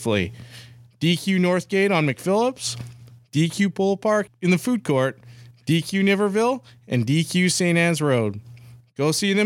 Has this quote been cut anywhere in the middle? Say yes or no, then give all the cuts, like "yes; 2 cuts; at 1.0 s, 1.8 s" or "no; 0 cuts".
yes; 1 cut; at 4.3 s